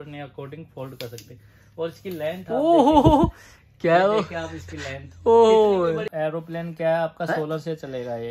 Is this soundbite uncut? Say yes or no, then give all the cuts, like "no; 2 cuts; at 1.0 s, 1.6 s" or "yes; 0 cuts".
no; 1 cut; at 6.1 s